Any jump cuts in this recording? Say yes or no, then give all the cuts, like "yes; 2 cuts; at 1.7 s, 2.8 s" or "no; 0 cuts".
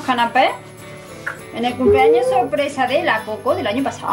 no; 0 cuts